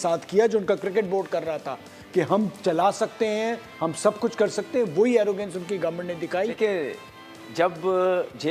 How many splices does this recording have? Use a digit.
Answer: 1